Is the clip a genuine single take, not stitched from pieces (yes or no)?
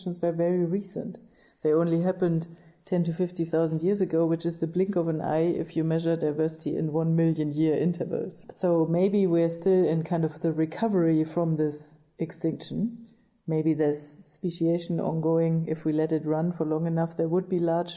no